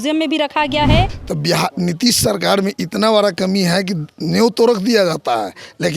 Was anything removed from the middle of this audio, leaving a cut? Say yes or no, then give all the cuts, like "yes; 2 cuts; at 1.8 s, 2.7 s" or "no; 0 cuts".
yes; 1 cut; at 1.2 s